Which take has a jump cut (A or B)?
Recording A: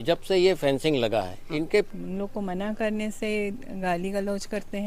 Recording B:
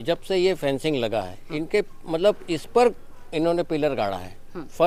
A